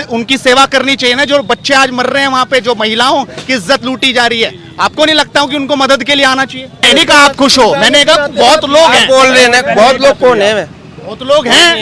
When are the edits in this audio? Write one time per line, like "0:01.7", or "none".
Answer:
0:06.8

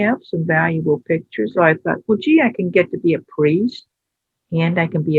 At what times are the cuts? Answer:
0:01.5

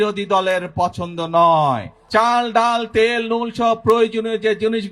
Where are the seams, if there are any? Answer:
0:01.9

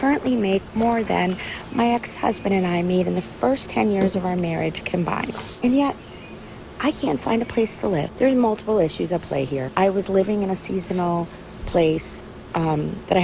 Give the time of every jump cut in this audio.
0:01.2

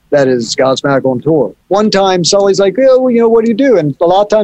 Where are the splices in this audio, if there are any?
0:01.6

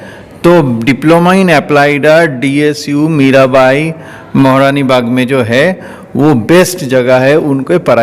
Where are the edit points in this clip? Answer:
none

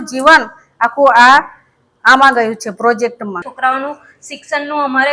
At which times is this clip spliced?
0:03.5

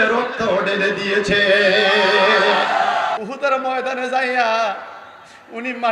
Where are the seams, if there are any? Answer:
0:03.2

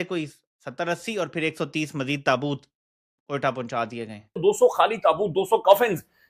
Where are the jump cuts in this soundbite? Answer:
0:04.4

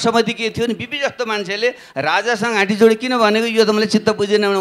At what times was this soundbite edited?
none

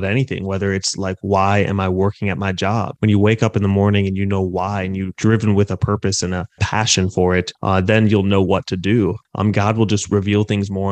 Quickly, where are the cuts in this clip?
0:09.2

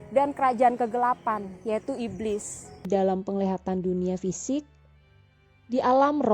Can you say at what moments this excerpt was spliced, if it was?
0:02.8

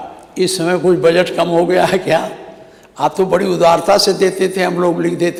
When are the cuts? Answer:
none

